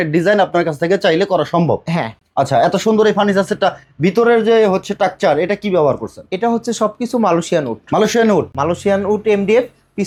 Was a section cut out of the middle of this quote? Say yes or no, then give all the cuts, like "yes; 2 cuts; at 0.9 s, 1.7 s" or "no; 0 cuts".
no; 0 cuts